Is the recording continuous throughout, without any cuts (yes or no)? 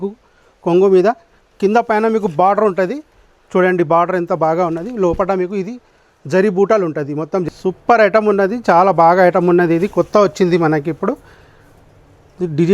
no